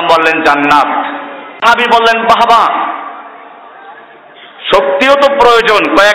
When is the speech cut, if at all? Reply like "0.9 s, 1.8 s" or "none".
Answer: 1.6 s